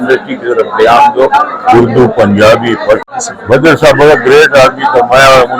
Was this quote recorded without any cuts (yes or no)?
no